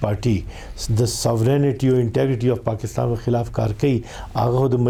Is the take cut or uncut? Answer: uncut